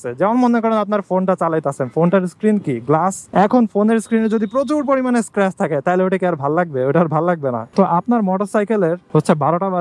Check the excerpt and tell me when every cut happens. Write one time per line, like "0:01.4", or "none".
none